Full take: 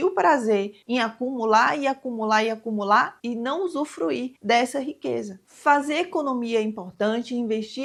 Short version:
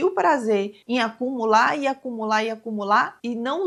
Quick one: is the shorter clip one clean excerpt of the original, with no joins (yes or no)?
yes